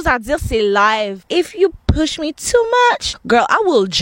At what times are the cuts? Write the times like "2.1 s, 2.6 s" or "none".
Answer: 1.2 s, 3.1 s